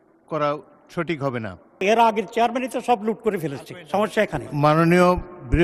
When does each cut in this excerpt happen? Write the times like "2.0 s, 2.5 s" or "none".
1.8 s